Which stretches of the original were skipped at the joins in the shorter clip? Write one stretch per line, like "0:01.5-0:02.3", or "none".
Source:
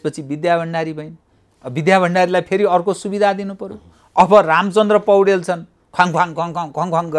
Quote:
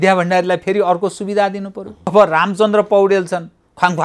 0:04.0-0:04.3